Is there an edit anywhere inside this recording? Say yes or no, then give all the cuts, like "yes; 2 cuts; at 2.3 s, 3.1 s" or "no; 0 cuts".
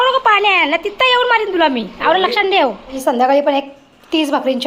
yes; 1 cut; at 3.0 s